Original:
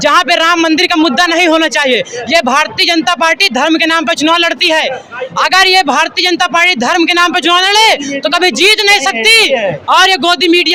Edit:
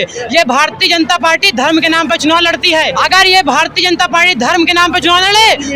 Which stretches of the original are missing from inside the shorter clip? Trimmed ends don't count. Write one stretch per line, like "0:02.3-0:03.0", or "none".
0:04.9-0:05.3